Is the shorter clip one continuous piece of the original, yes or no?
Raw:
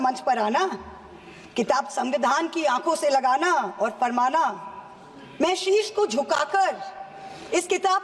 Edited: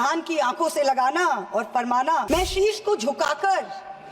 no